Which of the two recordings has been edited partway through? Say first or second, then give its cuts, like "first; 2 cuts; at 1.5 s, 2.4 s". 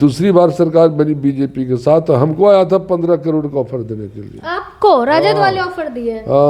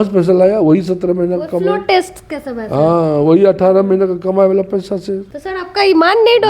second; 1 cut; at 5.2 s